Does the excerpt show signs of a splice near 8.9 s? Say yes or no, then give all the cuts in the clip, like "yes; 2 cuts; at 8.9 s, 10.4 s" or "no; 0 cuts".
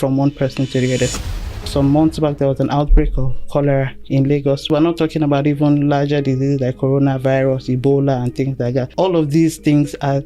yes; 3 cuts; at 1.2 s, 4.6 s, 8.9 s